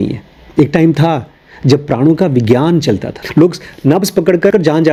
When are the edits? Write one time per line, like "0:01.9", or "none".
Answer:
none